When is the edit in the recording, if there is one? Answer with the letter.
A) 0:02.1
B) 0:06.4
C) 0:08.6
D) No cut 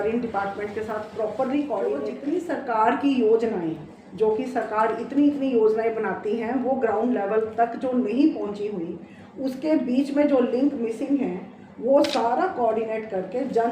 A